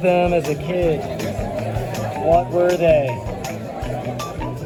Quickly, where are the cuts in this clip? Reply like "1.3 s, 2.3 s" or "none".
none